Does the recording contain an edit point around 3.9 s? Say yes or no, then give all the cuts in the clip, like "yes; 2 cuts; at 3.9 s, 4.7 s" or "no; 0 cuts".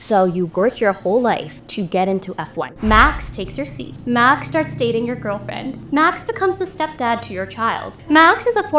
yes; 5 cuts; at 1.6 s, 2.7 s, 3.9 s, 5.8 s, 7.9 s